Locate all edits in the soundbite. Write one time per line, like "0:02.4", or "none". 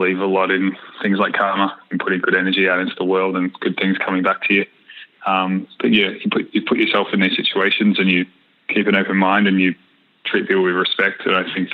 0:01.8